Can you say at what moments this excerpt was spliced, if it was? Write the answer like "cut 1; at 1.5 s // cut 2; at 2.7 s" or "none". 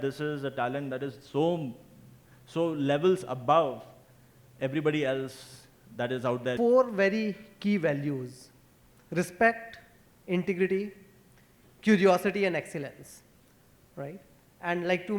cut 1; at 6.5 s